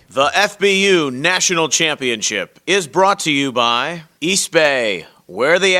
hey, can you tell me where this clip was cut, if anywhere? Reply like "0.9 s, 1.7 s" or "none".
4.0 s